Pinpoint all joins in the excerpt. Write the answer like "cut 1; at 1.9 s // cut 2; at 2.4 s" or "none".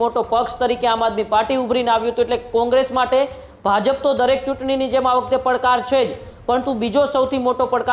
none